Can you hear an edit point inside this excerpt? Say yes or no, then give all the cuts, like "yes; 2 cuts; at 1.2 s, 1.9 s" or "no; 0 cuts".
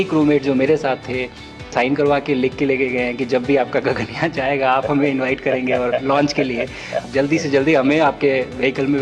yes; 2 cuts; at 1.7 s, 7.0 s